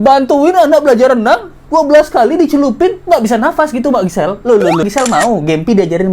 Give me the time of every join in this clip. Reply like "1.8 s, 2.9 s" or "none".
4.8 s